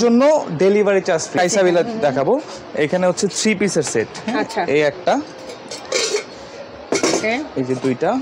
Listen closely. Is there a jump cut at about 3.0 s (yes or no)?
no